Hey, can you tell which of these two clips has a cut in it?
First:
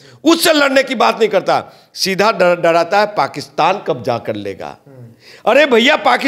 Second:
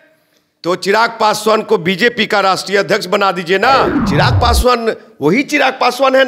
second; 1 cut; at 4.0 s

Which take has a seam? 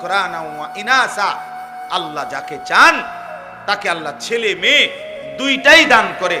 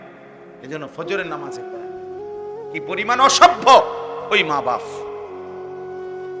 second; 2 cuts; at 1.4 s, 3.0 s

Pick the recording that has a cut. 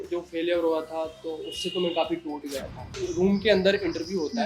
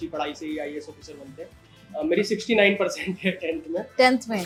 first; 1 cut; at 3.0 s

